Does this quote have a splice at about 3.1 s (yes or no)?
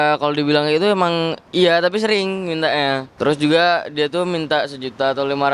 yes